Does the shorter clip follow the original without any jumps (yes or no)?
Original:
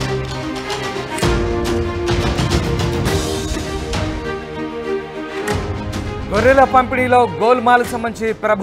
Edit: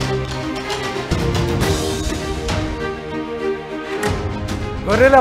no